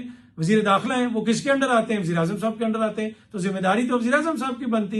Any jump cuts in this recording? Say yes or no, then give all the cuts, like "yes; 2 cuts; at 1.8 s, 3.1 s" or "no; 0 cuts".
no; 0 cuts